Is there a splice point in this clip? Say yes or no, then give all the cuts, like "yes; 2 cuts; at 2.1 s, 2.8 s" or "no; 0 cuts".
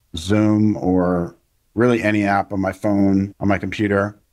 yes; 1 cut; at 3.3 s